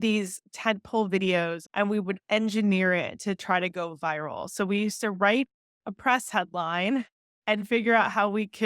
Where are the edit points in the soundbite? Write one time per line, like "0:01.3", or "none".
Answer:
0:01.6